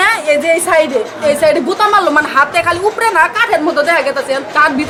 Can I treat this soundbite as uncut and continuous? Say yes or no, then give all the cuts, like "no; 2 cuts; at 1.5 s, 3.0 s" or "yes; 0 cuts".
yes; 0 cuts